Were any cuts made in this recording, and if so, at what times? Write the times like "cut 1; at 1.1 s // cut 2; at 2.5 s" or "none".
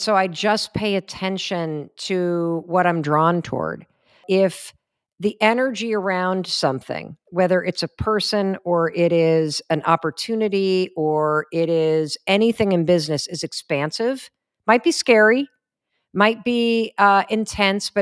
cut 1; at 4.2 s